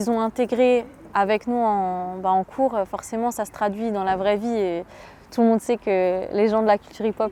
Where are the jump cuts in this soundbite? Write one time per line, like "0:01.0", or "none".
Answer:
none